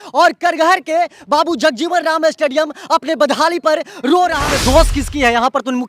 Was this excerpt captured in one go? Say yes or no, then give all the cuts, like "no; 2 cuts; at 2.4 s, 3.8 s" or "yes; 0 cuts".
no; 1 cut; at 4.4 s